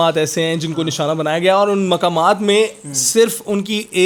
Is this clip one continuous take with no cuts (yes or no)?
yes